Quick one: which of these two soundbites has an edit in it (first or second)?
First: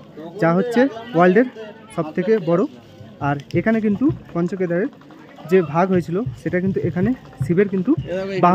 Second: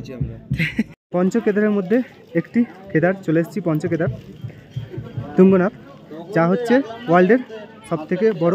second